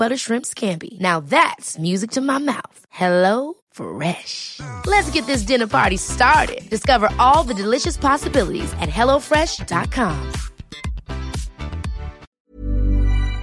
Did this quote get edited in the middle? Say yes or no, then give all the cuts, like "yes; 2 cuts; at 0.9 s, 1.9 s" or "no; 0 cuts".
yes; 1 cut; at 12.3 s